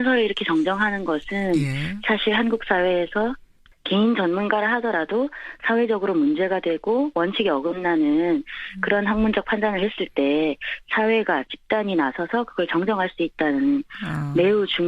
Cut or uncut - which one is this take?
uncut